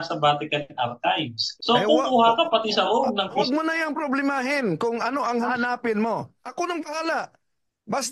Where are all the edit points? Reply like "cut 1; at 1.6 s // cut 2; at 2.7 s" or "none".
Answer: cut 1; at 1.5 s // cut 2; at 3.4 s // cut 3; at 5.5 s // cut 4; at 6.4 s